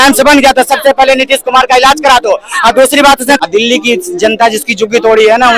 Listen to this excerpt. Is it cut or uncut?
cut